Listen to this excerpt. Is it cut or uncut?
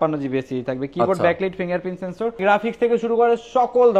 cut